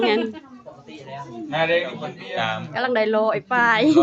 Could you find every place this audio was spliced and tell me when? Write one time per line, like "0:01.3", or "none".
0:02.1